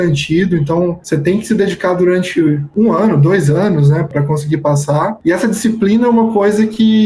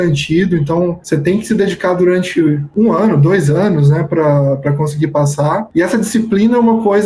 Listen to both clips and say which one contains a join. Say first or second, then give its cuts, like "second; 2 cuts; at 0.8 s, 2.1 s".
first; 1 cut; at 4.1 s